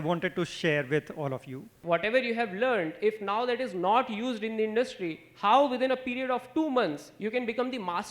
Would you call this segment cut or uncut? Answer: cut